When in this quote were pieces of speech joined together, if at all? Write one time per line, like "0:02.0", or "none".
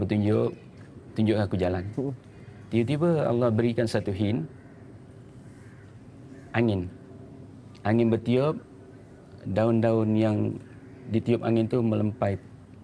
none